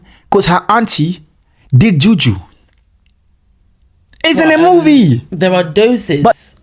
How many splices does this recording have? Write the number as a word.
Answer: one